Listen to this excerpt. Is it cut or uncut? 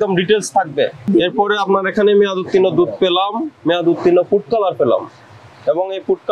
cut